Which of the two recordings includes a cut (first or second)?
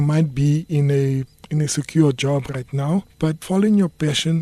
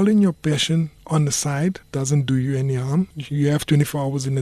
second